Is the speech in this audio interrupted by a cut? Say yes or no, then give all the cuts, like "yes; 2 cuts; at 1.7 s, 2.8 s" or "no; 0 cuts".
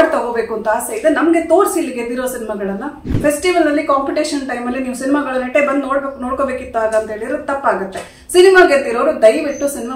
yes; 1 cut; at 3.1 s